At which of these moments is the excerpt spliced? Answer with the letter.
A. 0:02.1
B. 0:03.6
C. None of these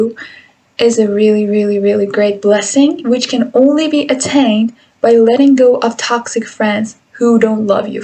C